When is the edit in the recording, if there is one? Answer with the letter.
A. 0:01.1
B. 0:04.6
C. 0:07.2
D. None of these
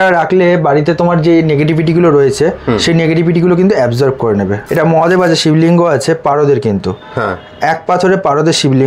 B